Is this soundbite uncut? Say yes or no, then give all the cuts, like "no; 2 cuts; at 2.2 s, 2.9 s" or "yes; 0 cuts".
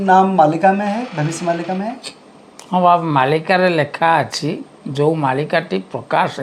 yes; 0 cuts